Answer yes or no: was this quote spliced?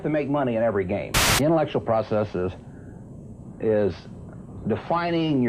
yes